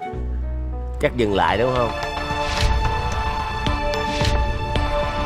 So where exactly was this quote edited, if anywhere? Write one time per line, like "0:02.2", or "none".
none